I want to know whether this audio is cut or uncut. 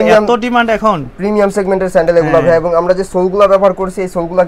uncut